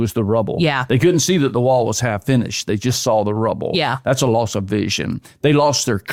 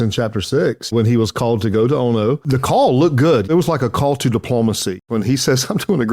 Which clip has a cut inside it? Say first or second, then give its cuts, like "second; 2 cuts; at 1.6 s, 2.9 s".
second; 4 cuts; at 0.9 s, 2.4 s, 3.5 s, 5.0 s